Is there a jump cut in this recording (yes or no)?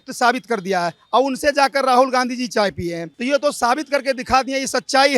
no